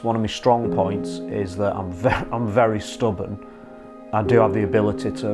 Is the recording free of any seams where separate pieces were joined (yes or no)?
no